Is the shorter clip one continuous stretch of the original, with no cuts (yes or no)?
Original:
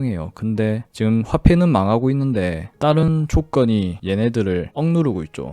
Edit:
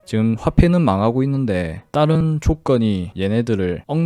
yes